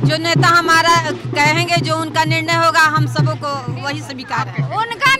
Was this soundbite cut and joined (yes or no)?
no